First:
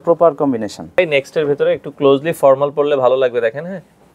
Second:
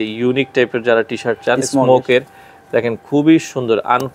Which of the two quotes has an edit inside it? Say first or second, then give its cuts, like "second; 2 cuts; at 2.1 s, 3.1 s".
first; 1 cut; at 1.0 s